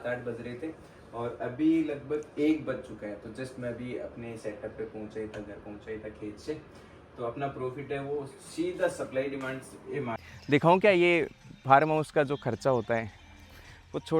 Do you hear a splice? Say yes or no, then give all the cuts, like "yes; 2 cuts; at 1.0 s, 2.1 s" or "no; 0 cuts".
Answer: yes; 1 cut; at 10.2 s